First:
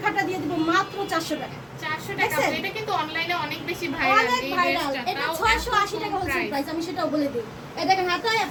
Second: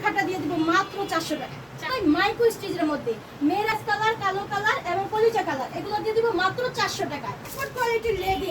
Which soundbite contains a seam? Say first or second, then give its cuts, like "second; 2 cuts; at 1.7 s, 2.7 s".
second; 3 cuts; at 1.9 s, 3.7 s, 7.6 s